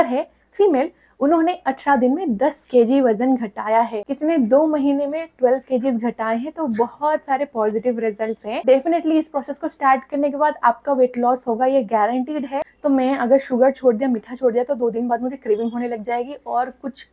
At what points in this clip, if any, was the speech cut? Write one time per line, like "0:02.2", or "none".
0:04.0
0:12.6

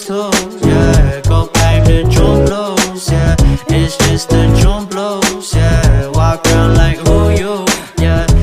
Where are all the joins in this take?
0:01.5

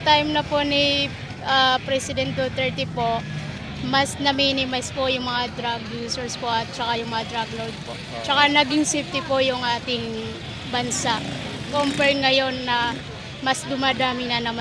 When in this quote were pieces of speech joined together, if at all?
none

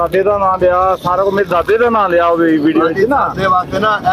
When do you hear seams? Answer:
none

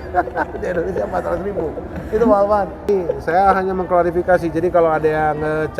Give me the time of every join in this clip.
0:02.8

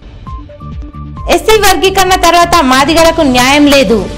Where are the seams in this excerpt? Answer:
0:01.1

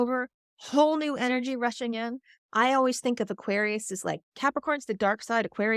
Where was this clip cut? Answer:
none

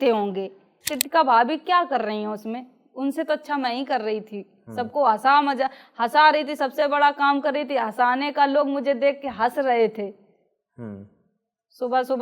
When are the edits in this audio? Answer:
0:01.0

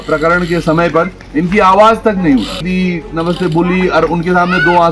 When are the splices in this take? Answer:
0:02.6

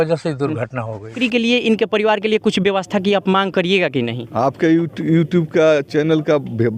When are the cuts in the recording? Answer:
0:01.2

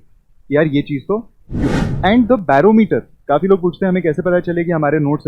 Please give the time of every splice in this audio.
0:01.7

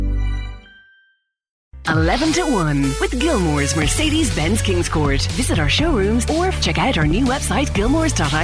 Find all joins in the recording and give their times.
0:01.8

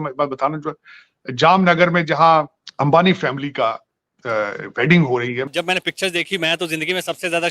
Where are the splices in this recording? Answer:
0:02.6
0:05.5

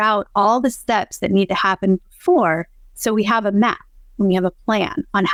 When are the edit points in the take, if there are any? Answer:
none

